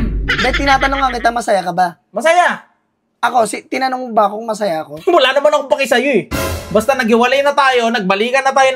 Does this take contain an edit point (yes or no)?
no